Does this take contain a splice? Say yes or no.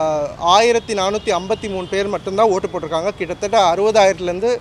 no